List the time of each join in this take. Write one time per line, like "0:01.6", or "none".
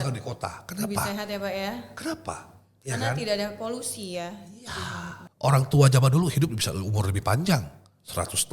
0:05.2